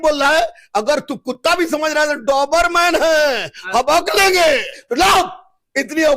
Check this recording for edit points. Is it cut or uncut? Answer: cut